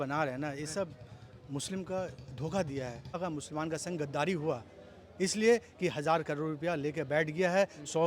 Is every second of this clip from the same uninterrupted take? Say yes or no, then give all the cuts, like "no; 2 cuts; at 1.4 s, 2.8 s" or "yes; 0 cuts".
no; 1 cut; at 3.2 s